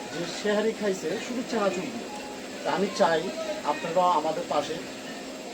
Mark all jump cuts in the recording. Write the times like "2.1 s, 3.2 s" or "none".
none